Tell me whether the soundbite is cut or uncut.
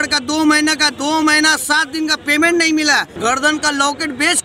cut